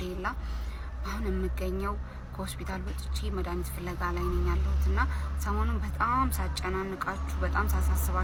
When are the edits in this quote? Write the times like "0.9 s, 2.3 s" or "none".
none